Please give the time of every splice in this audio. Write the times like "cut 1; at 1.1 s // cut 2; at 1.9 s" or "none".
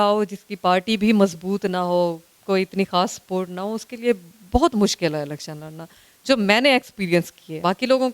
none